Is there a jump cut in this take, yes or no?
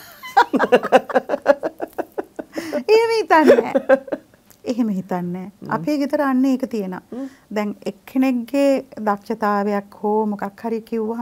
no